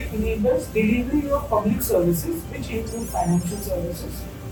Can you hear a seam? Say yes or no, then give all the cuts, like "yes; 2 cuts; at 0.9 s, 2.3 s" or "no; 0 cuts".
no; 0 cuts